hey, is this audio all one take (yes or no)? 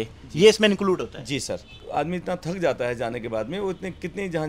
no